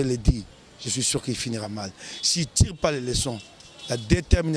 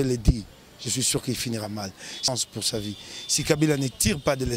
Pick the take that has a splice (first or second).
second